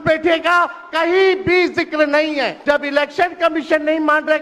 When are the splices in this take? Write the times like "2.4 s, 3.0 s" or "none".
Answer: 2.6 s